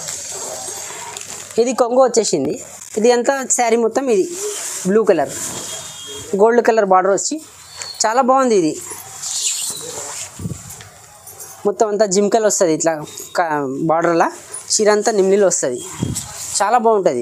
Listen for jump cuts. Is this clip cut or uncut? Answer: uncut